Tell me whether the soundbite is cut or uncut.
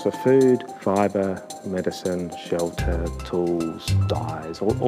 cut